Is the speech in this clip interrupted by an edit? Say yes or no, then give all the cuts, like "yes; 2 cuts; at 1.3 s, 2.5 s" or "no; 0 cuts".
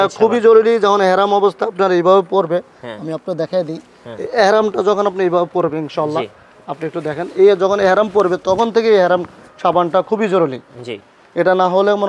no; 0 cuts